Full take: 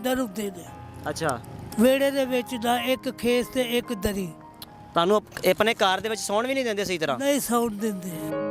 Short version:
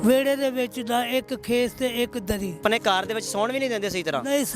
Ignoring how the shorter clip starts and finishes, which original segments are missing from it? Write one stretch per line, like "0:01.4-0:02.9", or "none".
0:04.4-0:05.6